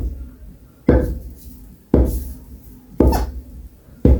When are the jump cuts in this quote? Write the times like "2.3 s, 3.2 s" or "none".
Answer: none